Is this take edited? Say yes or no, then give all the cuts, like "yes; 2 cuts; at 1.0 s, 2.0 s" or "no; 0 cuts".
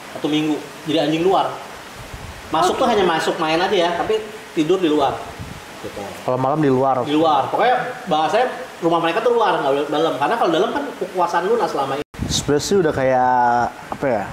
yes; 1 cut; at 12.1 s